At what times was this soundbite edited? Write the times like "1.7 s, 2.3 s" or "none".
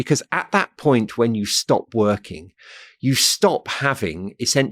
none